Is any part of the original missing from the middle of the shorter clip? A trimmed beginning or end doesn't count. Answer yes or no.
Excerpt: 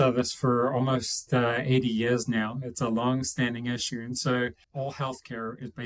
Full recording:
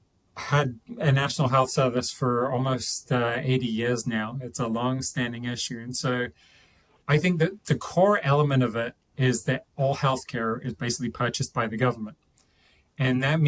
yes